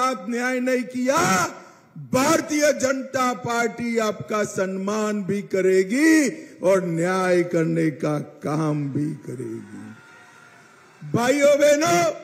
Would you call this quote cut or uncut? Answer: uncut